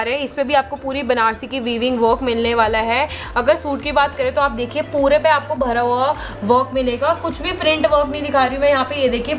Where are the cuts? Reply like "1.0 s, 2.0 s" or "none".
none